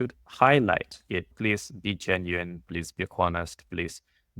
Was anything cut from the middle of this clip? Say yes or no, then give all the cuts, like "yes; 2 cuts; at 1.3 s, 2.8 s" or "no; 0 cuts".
yes; 1 cut; at 1.3 s